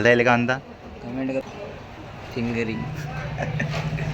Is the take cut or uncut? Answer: cut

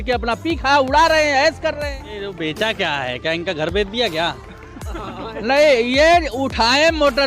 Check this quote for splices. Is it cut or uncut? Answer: cut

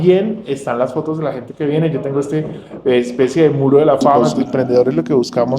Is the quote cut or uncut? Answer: cut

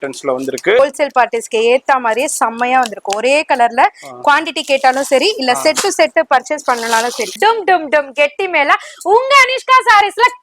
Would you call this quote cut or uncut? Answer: cut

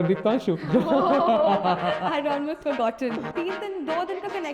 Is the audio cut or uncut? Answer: cut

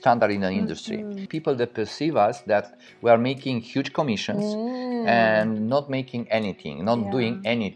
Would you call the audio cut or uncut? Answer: cut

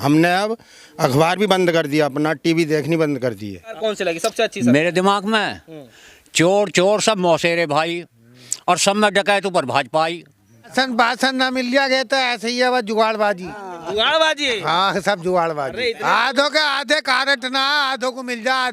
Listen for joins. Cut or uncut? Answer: cut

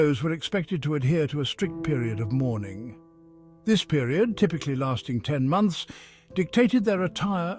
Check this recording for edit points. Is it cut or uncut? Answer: uncut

